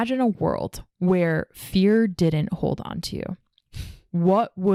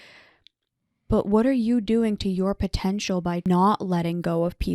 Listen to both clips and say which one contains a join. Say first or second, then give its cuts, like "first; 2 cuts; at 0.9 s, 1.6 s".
second; 1 cut; at 3.5 s